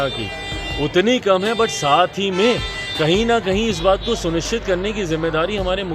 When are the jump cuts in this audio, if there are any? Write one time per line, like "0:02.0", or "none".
none